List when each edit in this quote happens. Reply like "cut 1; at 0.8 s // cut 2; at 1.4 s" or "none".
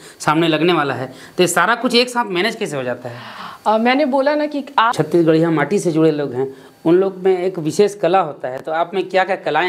cut 1; at 4.9 s